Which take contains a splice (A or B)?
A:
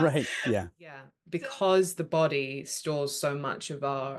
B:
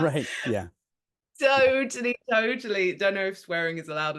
A